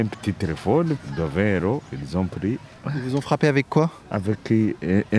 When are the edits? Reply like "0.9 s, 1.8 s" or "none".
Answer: 1.1 s, 2.7 s, 4.1 s